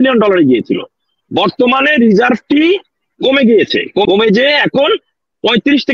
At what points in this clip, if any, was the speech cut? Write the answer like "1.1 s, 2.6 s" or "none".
4.0 s